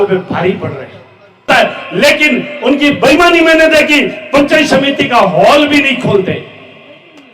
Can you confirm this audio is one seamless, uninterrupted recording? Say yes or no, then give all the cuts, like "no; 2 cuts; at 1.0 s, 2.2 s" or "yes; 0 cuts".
no; 1 cut; at 1.5 s